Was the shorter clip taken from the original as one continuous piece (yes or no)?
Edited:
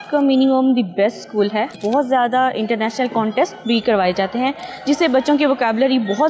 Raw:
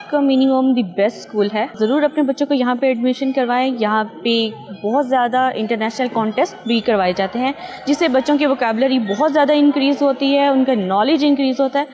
no